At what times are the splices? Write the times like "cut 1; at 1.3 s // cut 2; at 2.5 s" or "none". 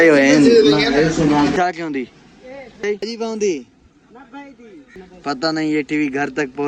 cut 1; at 1.5 s // cut 2; at 2.8 s // cut 3; at 5.0 s